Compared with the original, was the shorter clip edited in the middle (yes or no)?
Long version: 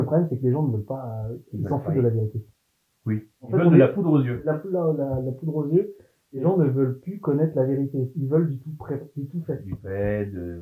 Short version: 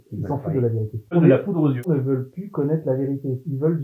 yes